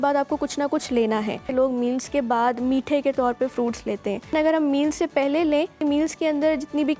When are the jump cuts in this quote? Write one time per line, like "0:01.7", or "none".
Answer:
0:01.5
0:04.3
0:05.8